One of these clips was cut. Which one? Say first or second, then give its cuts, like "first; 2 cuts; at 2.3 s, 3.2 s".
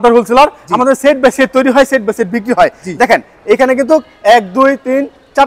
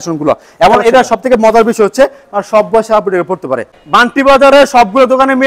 second; 1 cut; at 3.8 s